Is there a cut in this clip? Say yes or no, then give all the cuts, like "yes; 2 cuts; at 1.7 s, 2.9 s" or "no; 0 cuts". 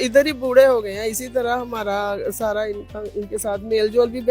no; 0 cuts